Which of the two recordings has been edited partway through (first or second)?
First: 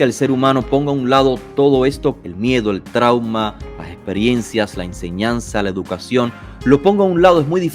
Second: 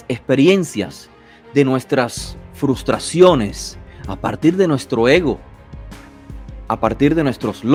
first